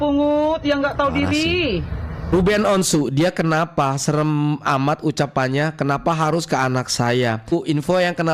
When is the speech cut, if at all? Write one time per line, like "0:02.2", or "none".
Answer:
0:02.3
0:07.5